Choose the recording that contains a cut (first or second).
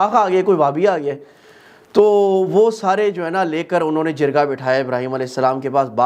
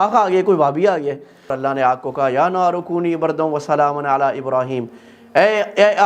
second